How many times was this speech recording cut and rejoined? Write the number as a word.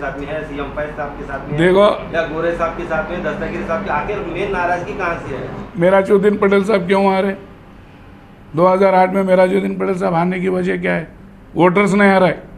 one